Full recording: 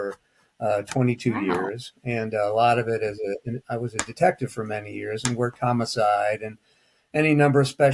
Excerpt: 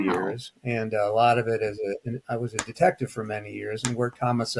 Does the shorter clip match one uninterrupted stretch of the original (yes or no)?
yes